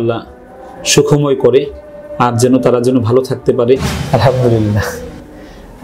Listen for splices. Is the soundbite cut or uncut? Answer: cut